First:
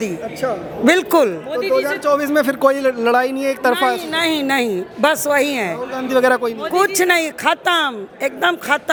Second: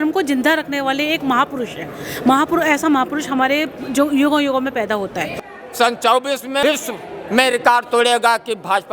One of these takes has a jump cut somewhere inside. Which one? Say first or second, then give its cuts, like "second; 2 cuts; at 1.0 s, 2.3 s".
second; 2 cuts; at 5.3 s, 6.6 s